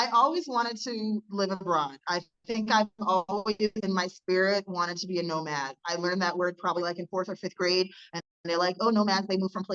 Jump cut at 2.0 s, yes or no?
no